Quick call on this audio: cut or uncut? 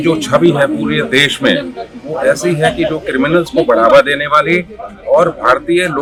uncut